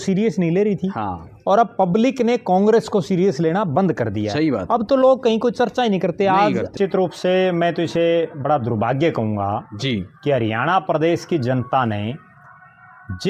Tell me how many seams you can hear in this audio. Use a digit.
1